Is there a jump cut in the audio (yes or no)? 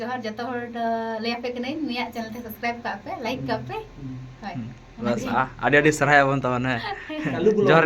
no